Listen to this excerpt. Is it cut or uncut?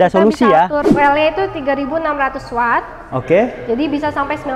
cut